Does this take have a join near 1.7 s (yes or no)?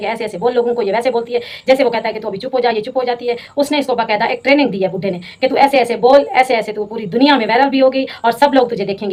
no